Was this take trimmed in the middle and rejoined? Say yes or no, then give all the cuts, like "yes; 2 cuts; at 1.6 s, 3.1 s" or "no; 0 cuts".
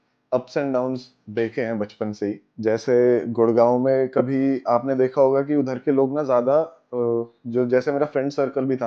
yes; 1 cut; at 2.5 s